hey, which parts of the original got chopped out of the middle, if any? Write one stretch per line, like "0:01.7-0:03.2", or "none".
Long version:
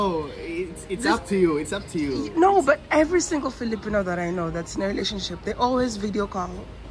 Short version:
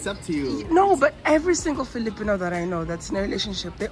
none

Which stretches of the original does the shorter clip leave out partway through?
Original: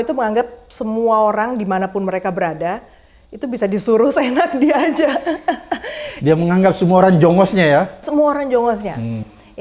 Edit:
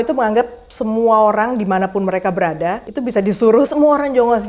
0:02.9-0:03.3
0:04.1-0:08.0

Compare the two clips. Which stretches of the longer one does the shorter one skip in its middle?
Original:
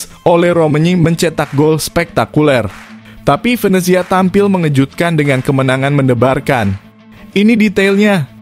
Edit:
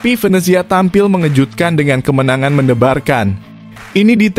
none

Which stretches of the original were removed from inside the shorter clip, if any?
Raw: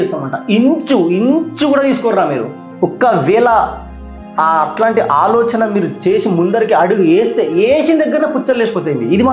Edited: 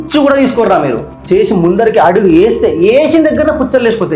0:02.7-0:05.9

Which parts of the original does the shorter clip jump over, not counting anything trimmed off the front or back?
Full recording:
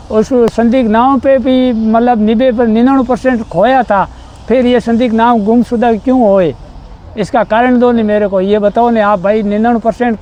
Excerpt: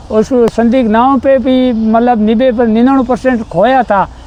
none

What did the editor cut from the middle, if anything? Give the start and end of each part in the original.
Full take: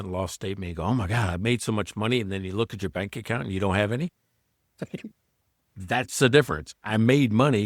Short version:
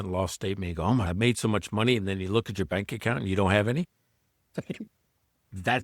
0:01.1-0:01.3

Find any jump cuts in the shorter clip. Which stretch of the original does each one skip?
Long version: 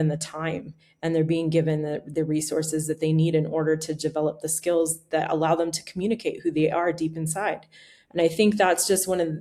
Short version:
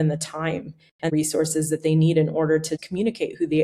0:01.1-0:02.3
0:03.9-0:05.8

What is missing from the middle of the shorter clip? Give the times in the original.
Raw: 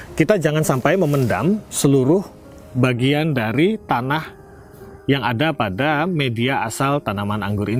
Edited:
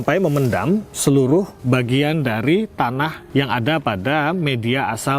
0:02.3-0:02.7
0:04.3-0:04.9

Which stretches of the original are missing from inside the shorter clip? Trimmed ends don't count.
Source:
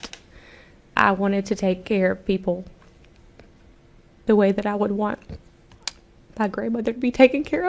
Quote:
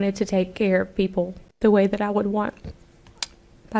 0:02.7-0:04.1

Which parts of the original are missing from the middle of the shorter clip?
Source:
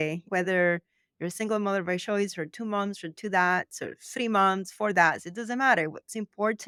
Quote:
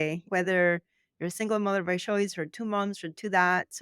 none

